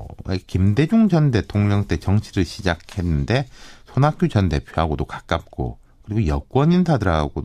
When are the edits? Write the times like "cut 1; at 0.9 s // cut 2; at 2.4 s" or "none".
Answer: cut 1; at 2.5 s